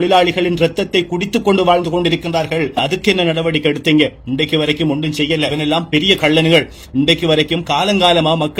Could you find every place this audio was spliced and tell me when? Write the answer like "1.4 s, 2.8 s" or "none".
5.6 s